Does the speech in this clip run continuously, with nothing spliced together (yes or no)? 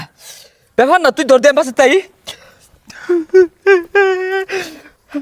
yes